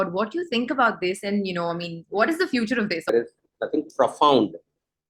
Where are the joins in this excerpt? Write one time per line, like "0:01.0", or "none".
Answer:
0:03.1